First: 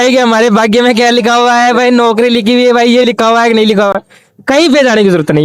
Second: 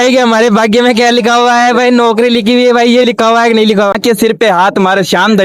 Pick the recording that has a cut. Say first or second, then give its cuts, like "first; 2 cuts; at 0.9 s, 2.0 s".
second; 1 cut; at 4.0 s